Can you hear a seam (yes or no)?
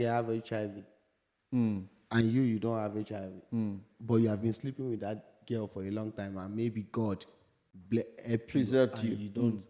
no